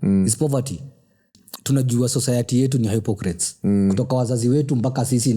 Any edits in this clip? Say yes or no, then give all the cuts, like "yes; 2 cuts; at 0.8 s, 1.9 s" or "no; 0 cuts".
yes; 1 cut; at 1.3 s